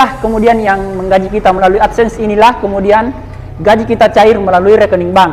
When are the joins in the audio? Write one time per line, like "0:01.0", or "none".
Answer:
none

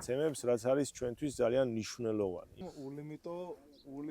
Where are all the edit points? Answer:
0:02.7

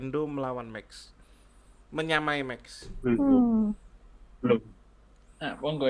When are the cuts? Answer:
none

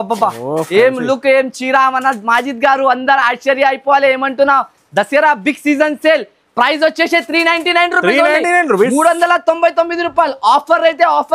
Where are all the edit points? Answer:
none

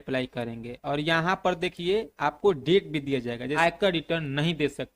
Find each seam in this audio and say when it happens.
0:03.5

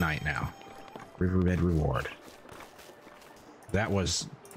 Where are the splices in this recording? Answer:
0:03.3

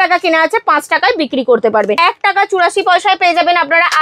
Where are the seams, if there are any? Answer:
0:02.0

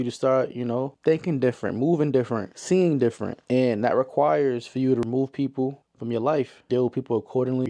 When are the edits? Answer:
none

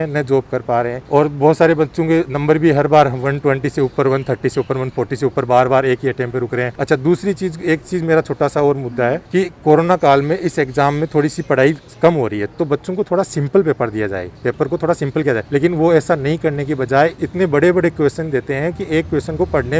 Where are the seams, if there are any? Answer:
none

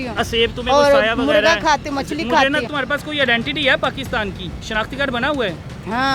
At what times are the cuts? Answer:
0:02.7
0:04.5

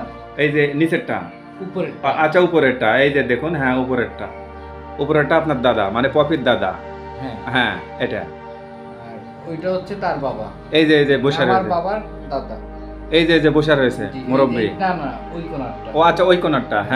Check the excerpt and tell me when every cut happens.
none

